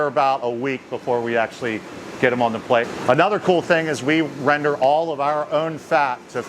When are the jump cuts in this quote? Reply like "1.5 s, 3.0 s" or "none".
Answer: 2.9 s